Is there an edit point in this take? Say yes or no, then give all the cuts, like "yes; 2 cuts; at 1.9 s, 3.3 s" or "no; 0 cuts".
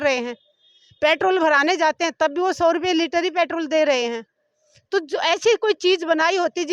no; 0 cuts